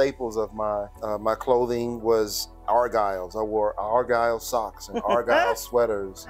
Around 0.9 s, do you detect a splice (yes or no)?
yes